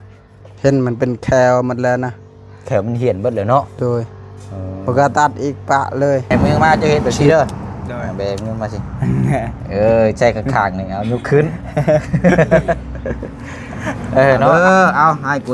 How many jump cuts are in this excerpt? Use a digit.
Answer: 2